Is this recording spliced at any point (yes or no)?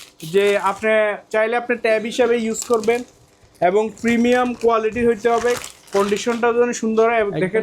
no